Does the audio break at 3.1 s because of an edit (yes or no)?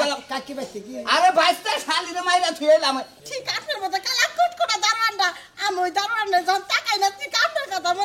yes